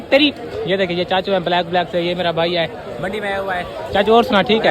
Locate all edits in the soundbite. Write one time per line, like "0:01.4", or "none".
none